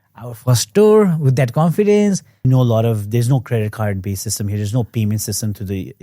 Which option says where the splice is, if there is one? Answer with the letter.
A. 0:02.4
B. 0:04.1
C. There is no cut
A